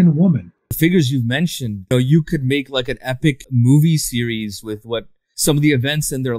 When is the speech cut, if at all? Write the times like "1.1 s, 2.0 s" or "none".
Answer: 0.8 s, 1.9 s, 3.4 s, 5.3 s